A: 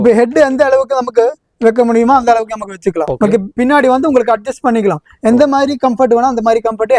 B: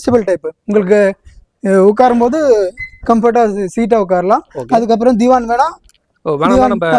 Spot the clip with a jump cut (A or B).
A